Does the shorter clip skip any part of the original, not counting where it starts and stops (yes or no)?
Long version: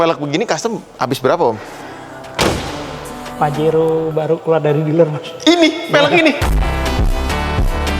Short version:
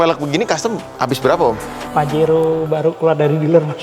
yes